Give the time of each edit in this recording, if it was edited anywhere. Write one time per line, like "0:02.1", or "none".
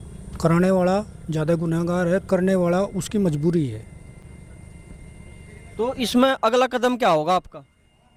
none